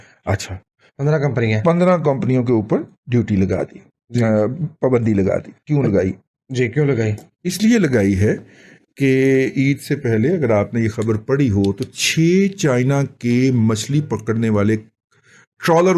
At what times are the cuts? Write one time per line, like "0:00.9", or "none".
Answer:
none